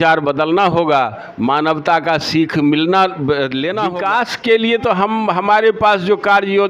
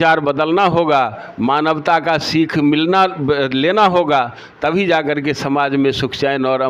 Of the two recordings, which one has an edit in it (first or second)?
first